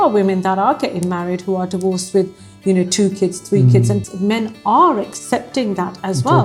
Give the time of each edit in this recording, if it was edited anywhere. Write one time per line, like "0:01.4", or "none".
0:04.1